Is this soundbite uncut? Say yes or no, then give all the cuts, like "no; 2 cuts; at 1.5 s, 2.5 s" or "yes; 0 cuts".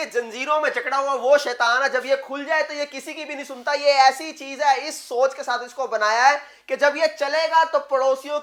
yes; 0 cuts